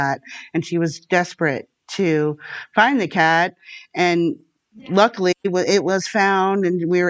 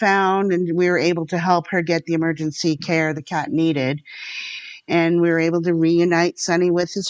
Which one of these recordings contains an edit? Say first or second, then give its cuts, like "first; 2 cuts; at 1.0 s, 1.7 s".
second; 1 cut; at 4.5 s